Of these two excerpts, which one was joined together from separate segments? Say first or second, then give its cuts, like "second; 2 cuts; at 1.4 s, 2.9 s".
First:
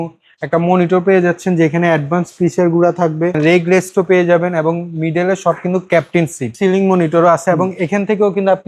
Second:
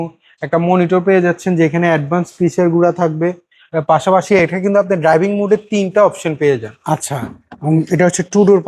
first; 2 cuts; at 3.4 s, 6.5 s